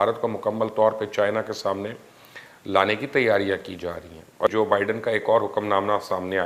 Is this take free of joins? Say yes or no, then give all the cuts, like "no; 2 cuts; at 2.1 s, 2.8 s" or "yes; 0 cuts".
no; 1 cut; at 4.1 s